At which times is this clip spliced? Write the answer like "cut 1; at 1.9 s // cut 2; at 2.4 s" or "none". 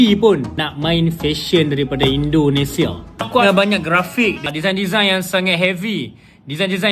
cut 1; at 3.4 s

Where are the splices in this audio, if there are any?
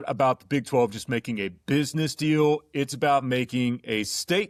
none

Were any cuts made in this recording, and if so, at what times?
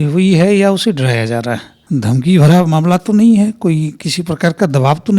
cut 1; at 1.7 s

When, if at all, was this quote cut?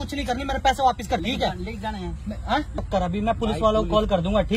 cut 1; at 1.2 s // cut 2; at 2.8 s

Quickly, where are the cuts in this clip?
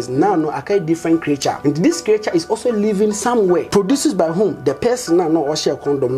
cut 1; at 1.6 s // cut 2; at 3.7 s

